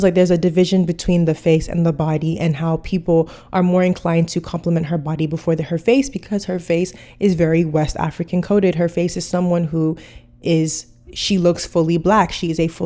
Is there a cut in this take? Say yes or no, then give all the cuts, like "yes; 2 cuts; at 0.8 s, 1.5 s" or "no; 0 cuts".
no; 0 cuts